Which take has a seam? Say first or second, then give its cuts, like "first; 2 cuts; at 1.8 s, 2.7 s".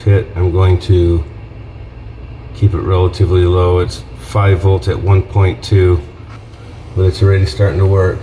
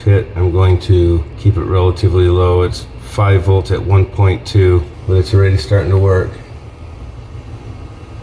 second; 2 cuts; at 1.3 s, 4.9 s